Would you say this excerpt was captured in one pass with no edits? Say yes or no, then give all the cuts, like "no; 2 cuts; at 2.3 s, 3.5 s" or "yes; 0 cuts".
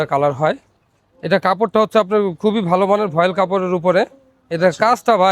yes; 0 cuts